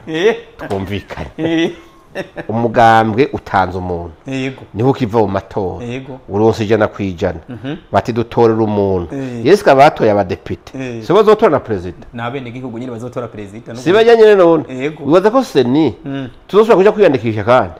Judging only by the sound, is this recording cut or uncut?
uncut